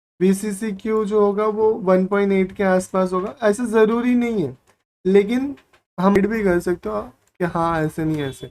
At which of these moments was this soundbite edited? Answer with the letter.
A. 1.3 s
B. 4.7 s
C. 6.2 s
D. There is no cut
C